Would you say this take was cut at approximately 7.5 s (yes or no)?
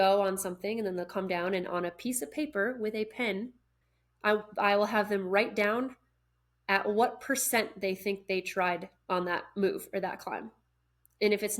no